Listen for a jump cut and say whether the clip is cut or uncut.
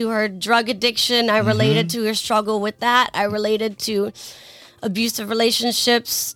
uncut